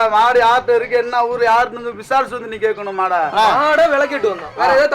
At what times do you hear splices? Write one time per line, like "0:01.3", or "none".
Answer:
0:03.3